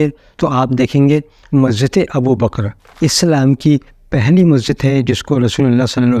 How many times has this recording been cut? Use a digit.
1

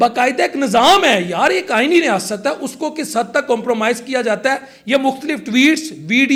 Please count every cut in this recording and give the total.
0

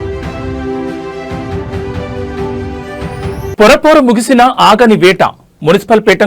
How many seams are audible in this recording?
0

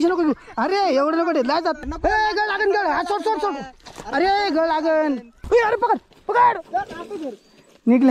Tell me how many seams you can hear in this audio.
2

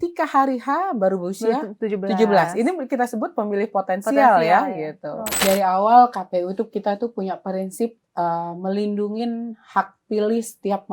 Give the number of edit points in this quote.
1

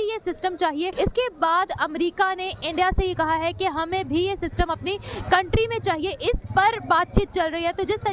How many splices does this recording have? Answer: 1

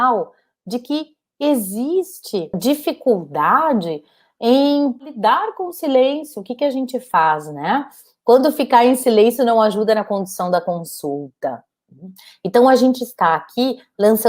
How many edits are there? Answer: 2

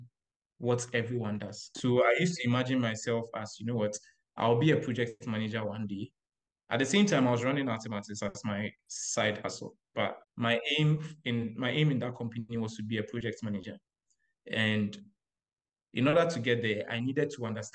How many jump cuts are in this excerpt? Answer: 2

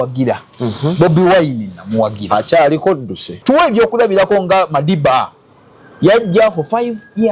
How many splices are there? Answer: 1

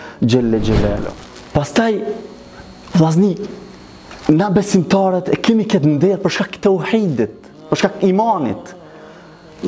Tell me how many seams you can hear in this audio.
1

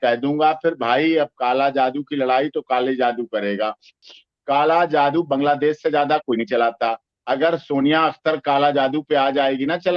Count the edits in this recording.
1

